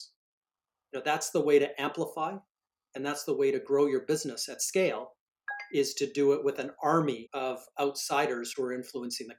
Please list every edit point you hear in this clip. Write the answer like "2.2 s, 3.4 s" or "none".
7.3 s